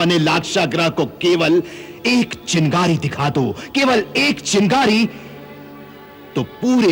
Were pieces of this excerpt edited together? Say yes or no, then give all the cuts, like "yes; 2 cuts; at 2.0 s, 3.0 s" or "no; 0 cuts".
no; 0 cuts